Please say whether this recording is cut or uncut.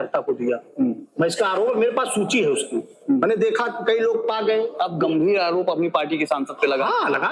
uncut